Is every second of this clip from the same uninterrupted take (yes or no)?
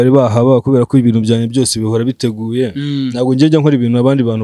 yes